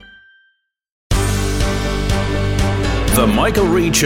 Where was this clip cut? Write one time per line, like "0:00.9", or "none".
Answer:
0:01.1

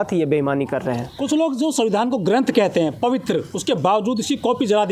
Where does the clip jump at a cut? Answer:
none

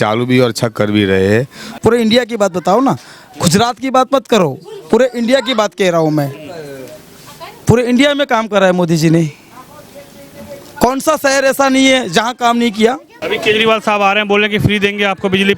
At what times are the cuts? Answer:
0:01.7
0:13.1

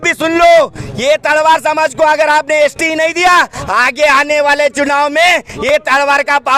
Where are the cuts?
none

